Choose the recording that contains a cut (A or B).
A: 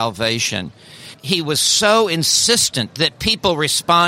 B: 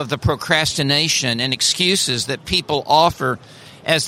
A